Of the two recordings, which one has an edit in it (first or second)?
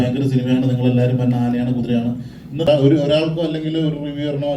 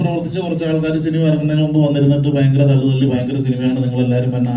first